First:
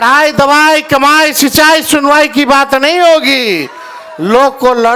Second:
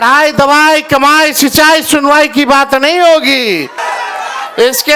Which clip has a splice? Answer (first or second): second